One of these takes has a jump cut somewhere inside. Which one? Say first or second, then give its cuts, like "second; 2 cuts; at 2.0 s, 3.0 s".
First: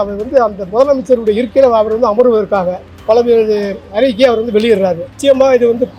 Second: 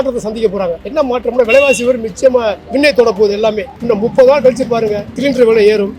second; 3 cuts; at 0.8 s, 2.6 s, 3.7 s